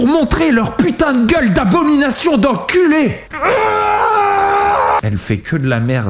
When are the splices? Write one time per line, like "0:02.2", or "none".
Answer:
0:03.2
0:05.0